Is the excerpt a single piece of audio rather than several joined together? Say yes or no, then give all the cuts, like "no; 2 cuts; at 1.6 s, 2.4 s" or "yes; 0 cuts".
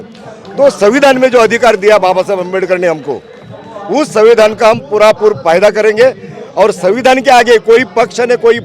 yes; 0 cuts